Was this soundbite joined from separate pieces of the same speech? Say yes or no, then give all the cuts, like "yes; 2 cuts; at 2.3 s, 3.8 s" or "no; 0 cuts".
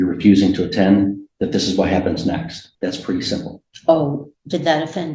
yes; 1 cut; at 2.6 s